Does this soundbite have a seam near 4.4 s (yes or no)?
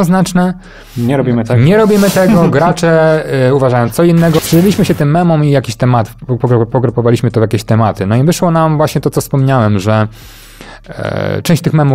yes